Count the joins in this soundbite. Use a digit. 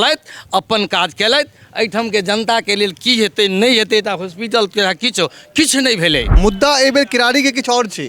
1